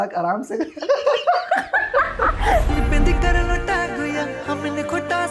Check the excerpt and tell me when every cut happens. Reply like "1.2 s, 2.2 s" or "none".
2.7 s